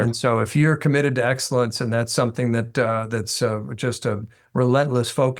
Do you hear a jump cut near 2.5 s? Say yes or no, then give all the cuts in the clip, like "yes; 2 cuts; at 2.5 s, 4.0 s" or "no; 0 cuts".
no; 0 cuts